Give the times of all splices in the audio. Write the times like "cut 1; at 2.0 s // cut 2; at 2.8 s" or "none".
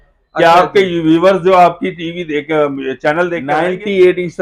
cut 1; at 3.4 s